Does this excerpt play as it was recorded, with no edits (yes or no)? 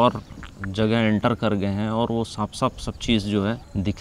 yes